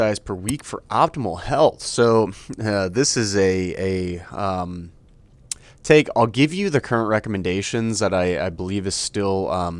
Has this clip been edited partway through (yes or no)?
no